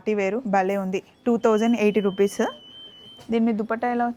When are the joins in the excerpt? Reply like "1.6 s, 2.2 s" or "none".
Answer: none